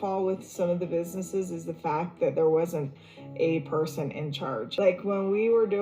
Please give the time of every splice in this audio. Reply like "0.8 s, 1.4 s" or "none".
4.7 s